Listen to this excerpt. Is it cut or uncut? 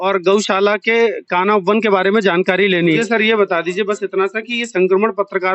cut